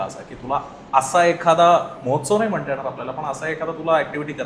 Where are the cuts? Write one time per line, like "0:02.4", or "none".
none